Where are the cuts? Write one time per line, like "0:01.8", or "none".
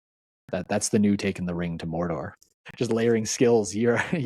0:02.4